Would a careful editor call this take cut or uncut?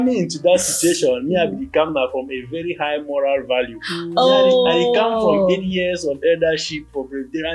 uncut